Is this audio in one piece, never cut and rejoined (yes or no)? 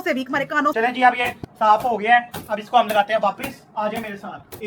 yes